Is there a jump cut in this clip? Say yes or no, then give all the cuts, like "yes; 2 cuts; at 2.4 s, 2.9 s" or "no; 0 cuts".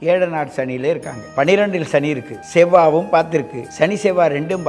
yes; 3 cuts; at 1.2 s, 2.3 s, 3.6 s